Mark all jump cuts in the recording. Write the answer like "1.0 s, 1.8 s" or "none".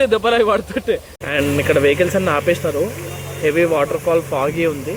1.1 s